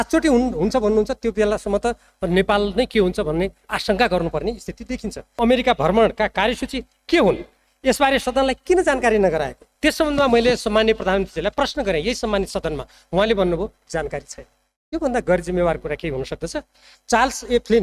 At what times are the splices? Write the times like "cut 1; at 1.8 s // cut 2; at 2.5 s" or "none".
cut 1; at 5.2 s // cut 2; at 9.6 s // cut 3; at 16.9 s